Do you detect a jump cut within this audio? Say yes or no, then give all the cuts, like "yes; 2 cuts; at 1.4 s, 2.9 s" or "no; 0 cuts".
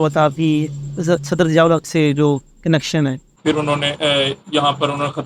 yes; 1 cut; at 3.3 s